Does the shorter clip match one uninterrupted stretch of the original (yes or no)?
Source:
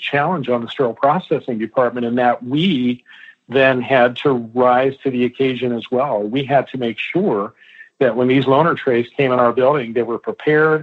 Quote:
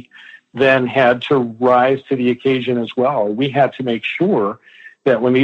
yes